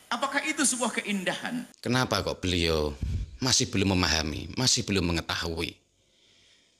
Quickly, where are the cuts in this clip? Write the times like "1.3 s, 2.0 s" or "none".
1.7 s